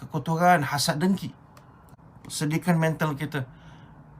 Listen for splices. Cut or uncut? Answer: cut